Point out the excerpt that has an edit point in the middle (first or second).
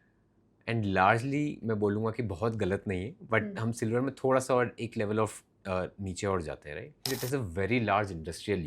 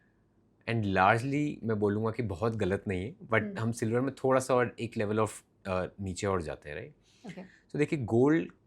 first